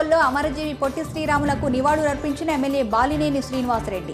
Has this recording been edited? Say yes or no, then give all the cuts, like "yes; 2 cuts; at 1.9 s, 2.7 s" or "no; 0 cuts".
no; 0 cuts